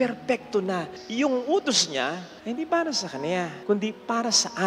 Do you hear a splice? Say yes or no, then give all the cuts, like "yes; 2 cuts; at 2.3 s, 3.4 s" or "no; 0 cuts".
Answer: yes; 3 cuts; at 1.0 s, 2.3 s, 3.5 s